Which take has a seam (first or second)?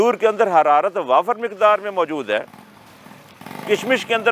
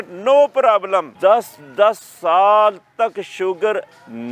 second